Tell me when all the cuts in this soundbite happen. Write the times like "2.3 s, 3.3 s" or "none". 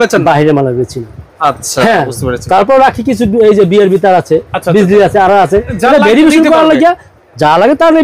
none